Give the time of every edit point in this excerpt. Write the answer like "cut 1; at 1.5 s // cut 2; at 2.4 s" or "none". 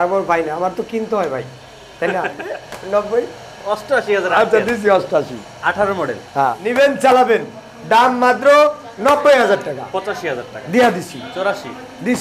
cut 1; at 2.5 s // cut 2; at 6.6 s